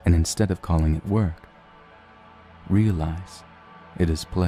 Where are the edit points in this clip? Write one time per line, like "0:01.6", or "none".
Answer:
none